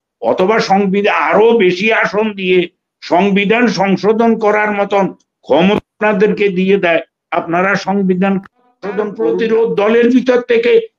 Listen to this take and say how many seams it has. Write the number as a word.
one